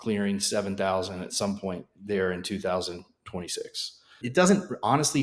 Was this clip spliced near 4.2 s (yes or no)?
yes